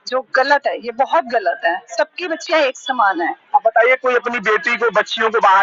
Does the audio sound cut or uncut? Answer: uncut